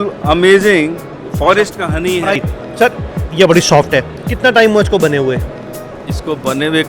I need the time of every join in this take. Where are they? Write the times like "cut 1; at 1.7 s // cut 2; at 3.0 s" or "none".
cut 1; at 2.4 s